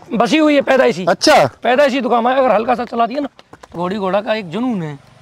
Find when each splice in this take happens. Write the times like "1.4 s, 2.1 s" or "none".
3.7 s